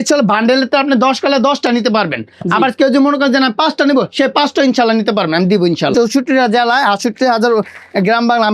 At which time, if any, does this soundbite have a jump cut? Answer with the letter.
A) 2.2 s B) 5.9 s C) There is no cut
B